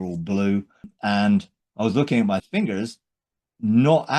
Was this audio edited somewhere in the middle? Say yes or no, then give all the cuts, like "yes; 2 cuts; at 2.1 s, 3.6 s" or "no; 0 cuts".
yes; 2 cuts; at 0.9 s, 2.4 s